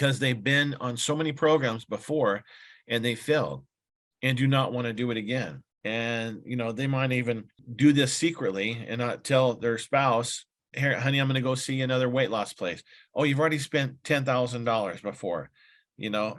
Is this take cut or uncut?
uncut